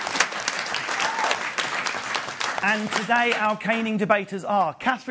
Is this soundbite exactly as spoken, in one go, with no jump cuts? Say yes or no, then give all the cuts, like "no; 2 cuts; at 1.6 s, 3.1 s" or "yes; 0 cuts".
no; 1 cut; at 2.4 s